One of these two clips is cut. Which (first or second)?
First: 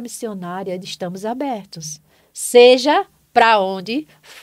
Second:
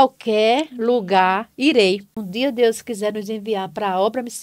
second